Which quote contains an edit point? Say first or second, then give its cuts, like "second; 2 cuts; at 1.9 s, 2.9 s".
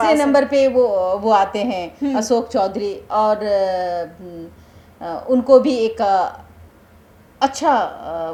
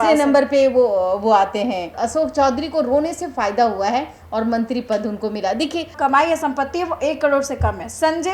second; 2 cuts; at 1.9 s, 5.9 s